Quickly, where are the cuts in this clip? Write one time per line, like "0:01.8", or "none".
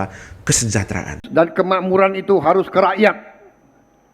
0:01.3